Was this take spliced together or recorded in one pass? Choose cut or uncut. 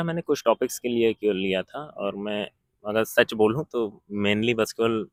uncut